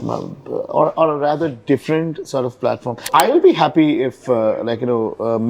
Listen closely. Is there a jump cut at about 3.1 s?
yes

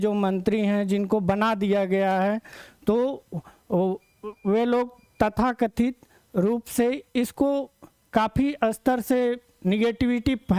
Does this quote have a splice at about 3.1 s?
no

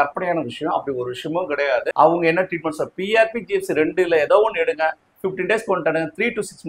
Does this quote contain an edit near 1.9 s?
yes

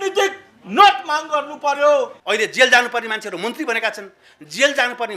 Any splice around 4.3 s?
no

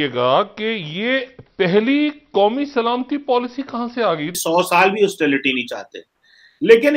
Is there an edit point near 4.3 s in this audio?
yes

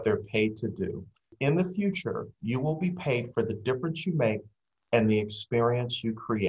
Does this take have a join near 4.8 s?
no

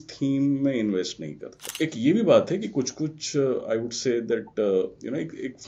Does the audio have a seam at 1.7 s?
yes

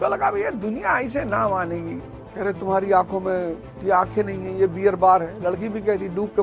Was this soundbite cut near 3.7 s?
no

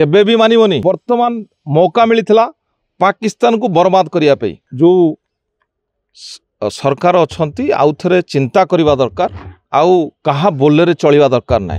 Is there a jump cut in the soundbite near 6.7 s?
no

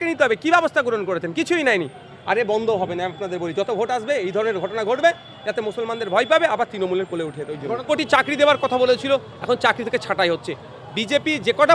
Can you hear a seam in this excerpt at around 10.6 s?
no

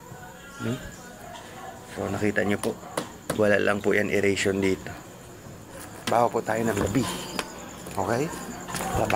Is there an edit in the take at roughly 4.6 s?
no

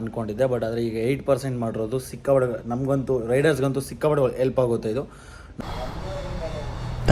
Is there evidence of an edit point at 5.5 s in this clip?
yes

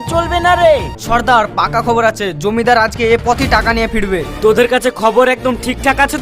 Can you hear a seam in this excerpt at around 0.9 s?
yes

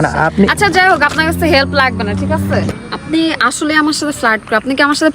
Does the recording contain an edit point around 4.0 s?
no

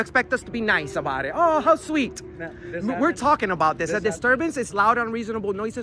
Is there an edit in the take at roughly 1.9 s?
no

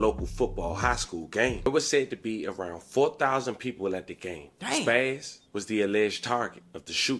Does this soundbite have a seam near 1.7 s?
yes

